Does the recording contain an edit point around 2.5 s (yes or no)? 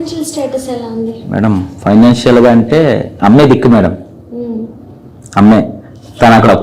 no